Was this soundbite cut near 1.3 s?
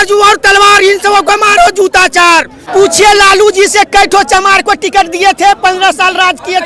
no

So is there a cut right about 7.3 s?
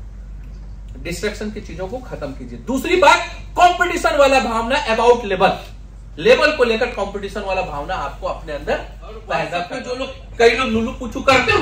no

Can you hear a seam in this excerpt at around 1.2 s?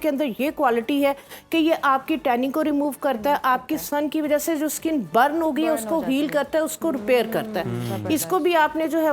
no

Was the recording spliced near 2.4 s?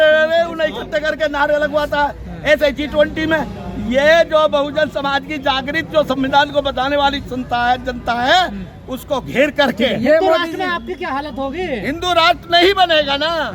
no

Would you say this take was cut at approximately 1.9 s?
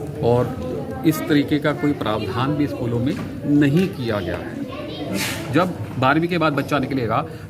no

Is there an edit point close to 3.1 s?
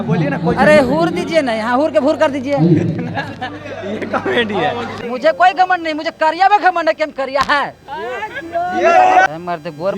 no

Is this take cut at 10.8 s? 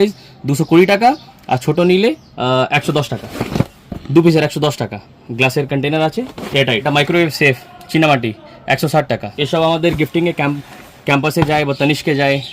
no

